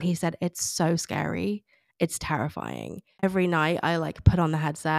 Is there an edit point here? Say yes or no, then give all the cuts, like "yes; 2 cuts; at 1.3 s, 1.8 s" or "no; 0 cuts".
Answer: yes; 1 cut; at 3.2 s